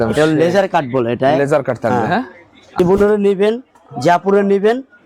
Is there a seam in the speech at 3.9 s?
no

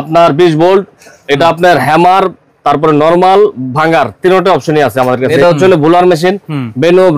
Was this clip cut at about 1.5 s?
no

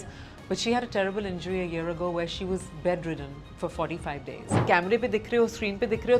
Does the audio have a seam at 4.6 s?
yes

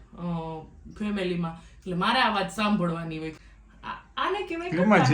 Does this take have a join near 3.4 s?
yes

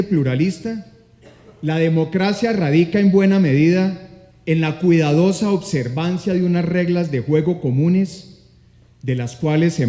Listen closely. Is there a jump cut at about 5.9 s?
no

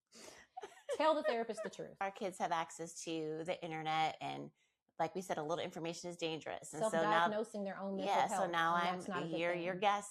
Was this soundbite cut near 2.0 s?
yes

